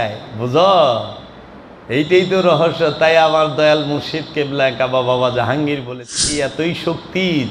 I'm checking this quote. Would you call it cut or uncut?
cut